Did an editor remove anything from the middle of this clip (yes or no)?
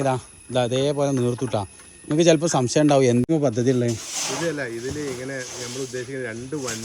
yes